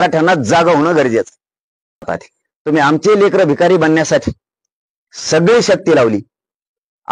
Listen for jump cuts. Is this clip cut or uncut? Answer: cut